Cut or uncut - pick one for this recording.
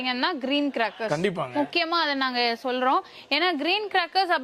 uncut